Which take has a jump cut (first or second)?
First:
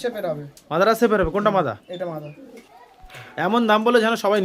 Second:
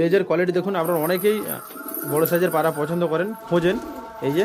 first